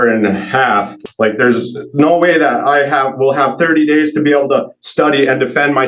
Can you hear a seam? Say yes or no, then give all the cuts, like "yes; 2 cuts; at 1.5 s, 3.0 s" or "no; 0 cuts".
yes; 1 cut; at 0.9 s